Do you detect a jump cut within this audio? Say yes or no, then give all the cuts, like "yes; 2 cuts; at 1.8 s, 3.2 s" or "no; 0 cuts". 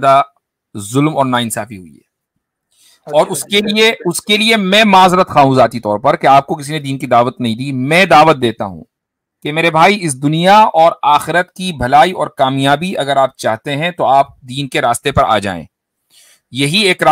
no; 0 cuts